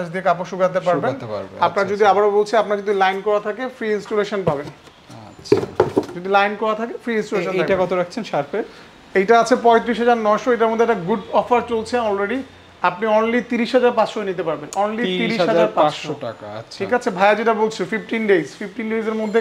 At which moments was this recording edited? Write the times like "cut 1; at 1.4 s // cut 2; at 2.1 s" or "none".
none